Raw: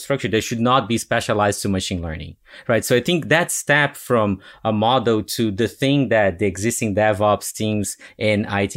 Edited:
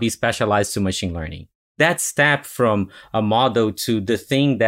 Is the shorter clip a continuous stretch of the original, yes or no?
no